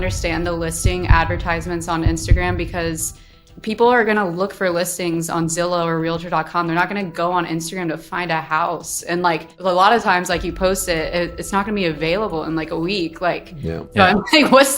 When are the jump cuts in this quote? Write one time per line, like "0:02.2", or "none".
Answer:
0:09.5